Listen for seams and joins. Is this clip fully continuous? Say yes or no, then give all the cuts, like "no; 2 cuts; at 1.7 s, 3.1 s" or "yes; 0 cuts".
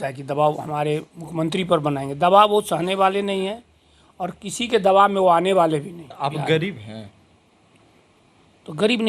no; 1 cut; at 6.0 s